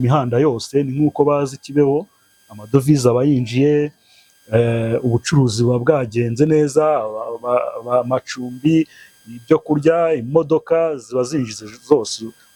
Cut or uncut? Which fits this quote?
uncut